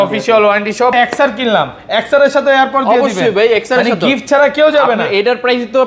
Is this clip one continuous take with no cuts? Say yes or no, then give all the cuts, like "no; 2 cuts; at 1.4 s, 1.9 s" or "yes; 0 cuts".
no; 1 cut; at 0.9 s